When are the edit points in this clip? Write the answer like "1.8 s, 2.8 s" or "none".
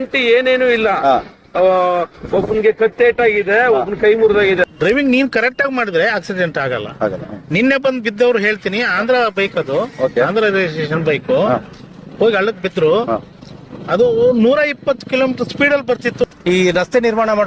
4.6 s, 16.2 s